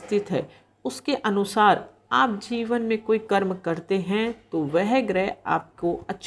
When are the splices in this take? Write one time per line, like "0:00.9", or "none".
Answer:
none